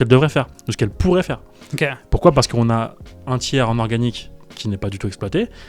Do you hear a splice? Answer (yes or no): no